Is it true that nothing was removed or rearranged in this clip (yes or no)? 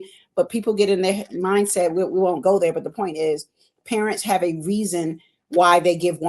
yes